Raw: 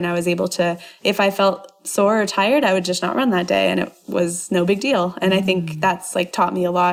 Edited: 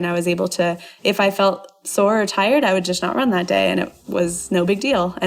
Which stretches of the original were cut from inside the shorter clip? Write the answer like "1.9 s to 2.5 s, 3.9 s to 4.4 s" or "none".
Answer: none

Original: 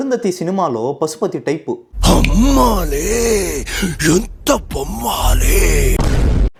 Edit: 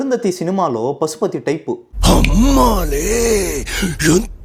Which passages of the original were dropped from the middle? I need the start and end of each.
none

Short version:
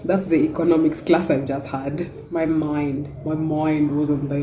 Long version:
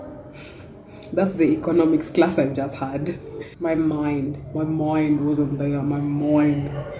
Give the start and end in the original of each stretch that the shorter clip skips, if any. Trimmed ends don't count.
3.2 s to 3.5 s

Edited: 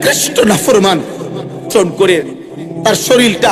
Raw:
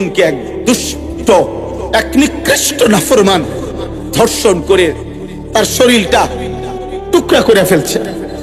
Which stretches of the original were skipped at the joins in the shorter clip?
4.1 s to 4.3 s

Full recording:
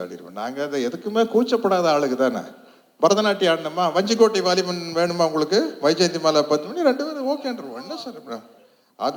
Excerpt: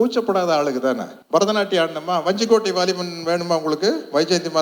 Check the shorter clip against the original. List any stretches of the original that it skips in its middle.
2.5 s to 2.8 s

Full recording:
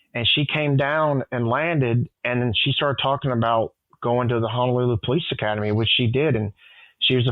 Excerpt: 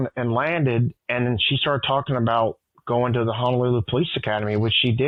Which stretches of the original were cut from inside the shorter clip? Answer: none

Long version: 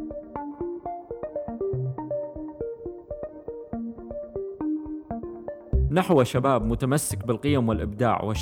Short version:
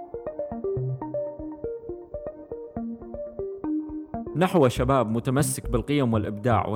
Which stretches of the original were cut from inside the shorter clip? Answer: 5.3 s to 5.9 s

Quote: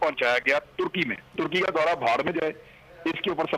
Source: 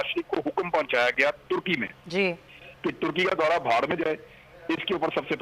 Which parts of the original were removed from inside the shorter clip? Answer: 2.0 s to 3.0 s

